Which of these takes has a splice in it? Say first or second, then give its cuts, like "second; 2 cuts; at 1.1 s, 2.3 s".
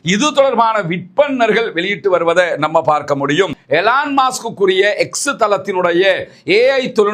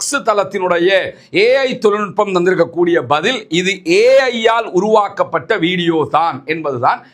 first; 1 cut; at 3.6 s